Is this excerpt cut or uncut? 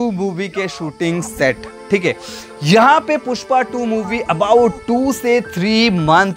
uncut